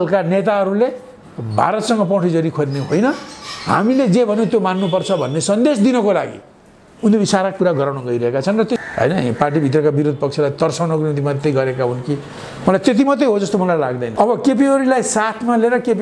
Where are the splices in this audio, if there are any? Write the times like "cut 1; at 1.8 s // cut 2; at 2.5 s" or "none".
cut 1; at 8.8 s // cut 2; at 14.0 s